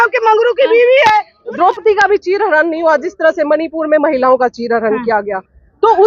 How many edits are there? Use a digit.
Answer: 1